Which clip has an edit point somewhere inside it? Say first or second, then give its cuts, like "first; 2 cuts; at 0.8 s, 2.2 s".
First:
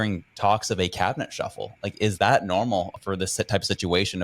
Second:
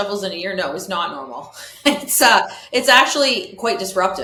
first; 1 cut; at 2.9 s